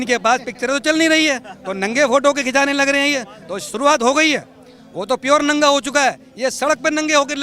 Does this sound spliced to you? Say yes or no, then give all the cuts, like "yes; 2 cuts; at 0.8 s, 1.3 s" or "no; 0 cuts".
no; 0 cuts